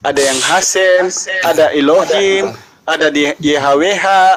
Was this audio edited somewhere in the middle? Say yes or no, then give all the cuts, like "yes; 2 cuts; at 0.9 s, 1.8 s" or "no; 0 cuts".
no; 0 cuts